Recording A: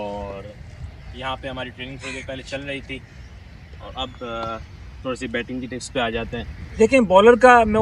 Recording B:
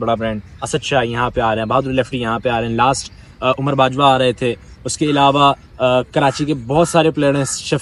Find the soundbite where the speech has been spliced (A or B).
A